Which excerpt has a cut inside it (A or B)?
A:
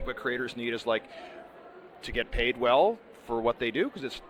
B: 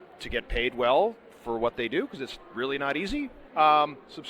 B